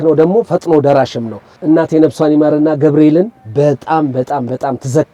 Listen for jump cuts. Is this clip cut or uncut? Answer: cut